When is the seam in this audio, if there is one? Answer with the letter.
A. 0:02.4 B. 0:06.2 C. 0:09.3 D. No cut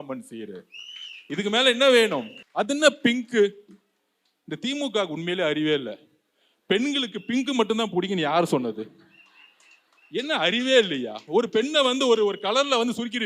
A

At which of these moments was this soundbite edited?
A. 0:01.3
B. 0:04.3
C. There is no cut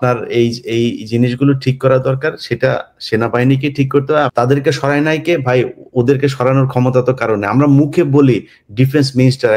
B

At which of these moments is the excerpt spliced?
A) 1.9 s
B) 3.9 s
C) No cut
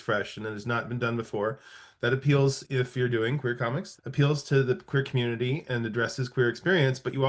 B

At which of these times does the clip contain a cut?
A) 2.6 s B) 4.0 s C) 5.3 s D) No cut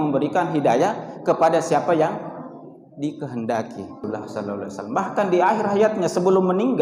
B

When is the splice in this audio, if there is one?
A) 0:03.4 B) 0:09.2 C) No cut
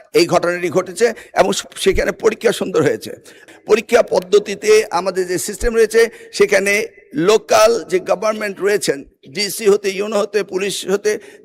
A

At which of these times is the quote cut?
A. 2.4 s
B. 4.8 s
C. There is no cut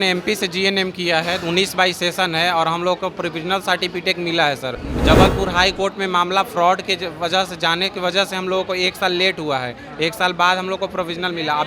B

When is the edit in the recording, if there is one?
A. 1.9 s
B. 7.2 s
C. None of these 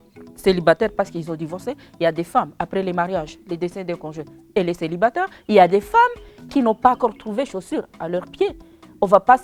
C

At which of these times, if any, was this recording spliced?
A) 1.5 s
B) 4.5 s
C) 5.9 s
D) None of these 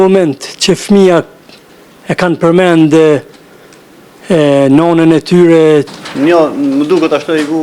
C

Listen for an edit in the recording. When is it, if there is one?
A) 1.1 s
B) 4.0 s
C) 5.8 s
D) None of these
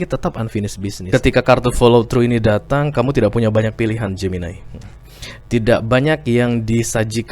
A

